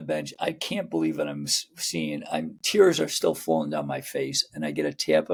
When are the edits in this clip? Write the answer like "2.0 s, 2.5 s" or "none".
none